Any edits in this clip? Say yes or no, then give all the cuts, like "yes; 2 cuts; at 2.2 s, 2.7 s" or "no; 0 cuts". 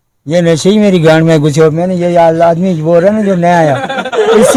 no; 0 cuts